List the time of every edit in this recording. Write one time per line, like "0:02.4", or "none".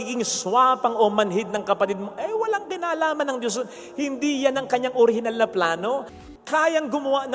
0:06.1

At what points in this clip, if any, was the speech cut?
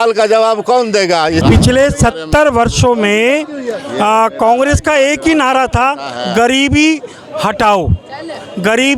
0:01.4

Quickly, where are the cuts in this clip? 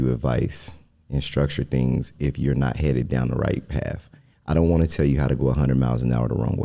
none

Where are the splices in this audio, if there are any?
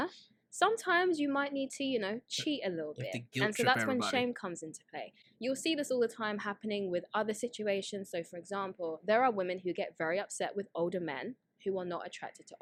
none

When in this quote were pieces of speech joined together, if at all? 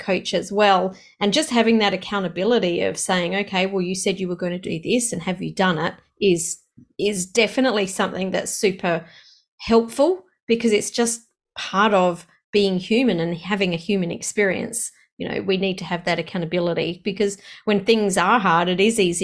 none

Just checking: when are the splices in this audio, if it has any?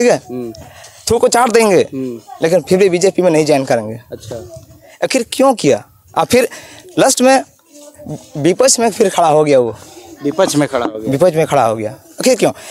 none

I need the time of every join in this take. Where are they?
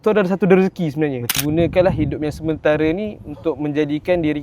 0:01.4

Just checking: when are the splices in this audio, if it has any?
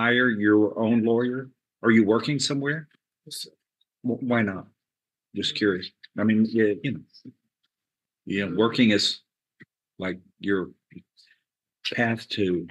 none

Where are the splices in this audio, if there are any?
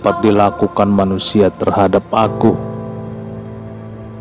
none

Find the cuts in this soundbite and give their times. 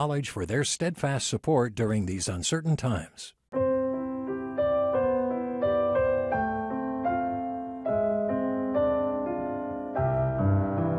0:03.4

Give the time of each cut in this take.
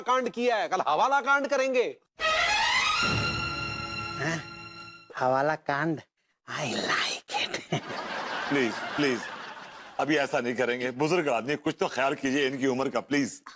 none

